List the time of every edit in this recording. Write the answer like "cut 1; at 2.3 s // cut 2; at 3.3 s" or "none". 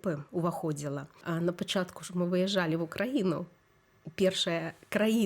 cut 1; at 1.1 s